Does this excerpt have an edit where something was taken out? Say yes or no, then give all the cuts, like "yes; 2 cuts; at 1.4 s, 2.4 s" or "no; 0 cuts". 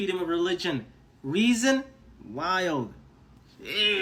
no; 0 cuts